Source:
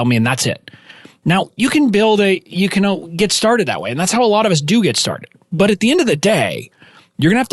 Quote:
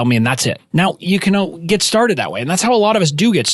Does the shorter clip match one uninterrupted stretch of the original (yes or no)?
no